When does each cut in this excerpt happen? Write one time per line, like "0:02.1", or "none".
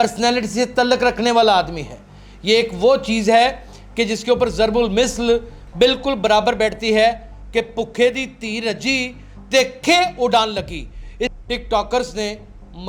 0:11.3